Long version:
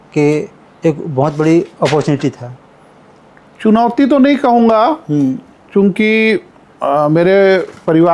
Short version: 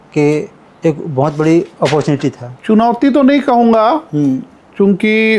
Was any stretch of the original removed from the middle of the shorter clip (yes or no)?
yes